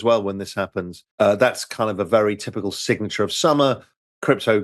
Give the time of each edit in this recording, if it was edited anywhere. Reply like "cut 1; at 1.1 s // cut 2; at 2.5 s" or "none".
cut 1; at 1.0 s